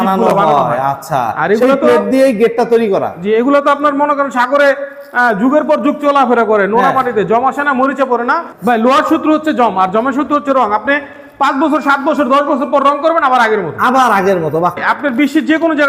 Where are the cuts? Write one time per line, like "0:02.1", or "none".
0:08.5
0:14.8